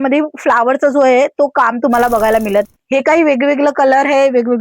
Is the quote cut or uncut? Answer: cut